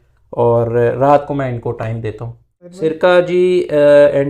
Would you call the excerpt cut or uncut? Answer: cut